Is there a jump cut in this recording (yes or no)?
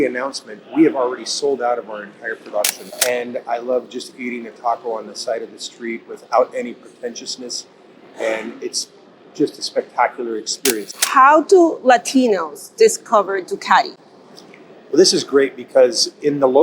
yes